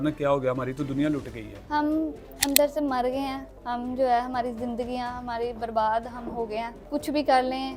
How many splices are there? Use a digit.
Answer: 0